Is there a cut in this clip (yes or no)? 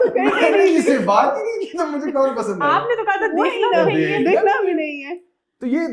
no